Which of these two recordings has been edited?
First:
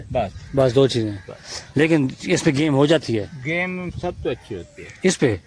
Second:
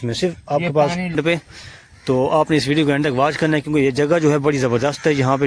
second; 1 cut; at 1.1 s

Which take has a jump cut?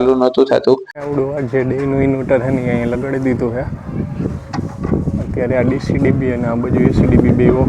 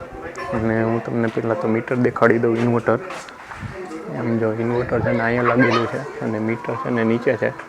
first; 1 cut; at 1.0 s

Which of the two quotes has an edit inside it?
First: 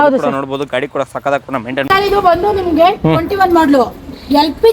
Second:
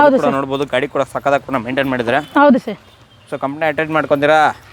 first; 1 cut; at 1.8 s

